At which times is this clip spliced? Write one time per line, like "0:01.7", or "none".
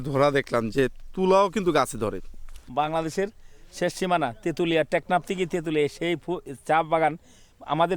0:02.6